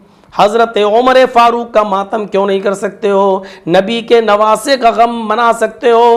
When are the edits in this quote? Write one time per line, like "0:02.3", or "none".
none